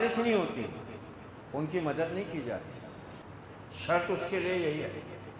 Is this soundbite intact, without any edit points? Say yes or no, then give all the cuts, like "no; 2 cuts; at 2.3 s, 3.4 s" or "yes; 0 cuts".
no; 1 cut; at 3.2 s